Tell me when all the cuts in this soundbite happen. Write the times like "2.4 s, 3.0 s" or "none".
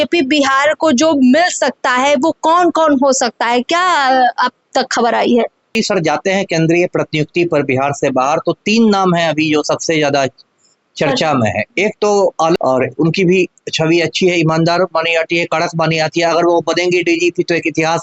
5.6 s, 12.6 s

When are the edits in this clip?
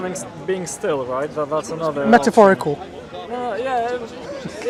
none

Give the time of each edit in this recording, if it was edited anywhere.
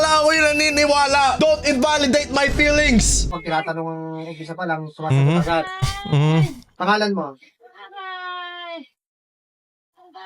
3.4 s

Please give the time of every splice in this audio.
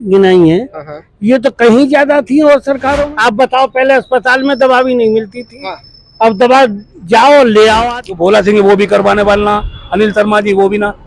3.1 s, 8.0 s

